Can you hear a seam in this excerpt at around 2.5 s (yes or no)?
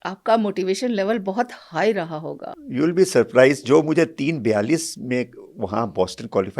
yes